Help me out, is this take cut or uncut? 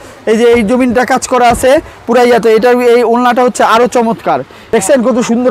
cut